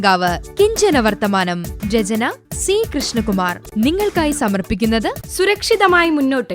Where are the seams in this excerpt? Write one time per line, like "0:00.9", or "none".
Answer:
0:03.6